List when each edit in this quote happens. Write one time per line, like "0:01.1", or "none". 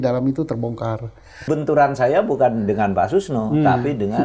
0:01.5